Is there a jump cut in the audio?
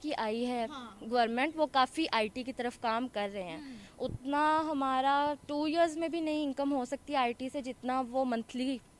no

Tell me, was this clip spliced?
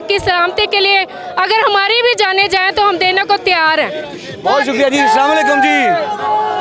no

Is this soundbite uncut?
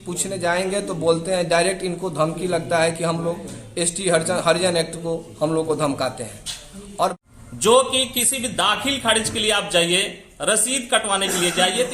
no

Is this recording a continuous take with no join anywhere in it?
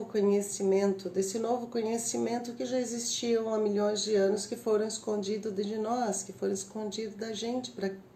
yes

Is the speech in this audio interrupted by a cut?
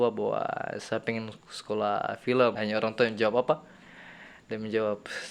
yes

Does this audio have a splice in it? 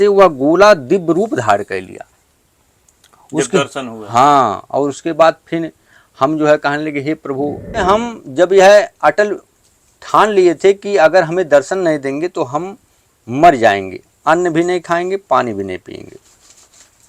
yes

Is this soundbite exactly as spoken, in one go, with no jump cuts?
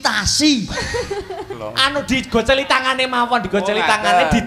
no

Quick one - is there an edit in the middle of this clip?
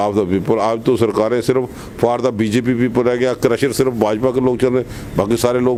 no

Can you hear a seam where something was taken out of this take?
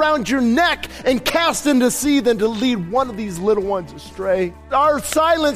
yes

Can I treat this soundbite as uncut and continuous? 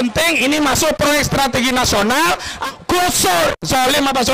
no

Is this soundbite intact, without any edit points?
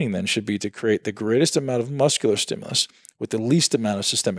yes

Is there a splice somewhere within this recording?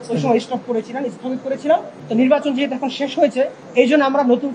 yes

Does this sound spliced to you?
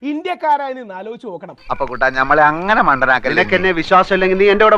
no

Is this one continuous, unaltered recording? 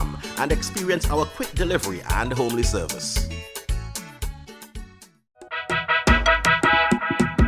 no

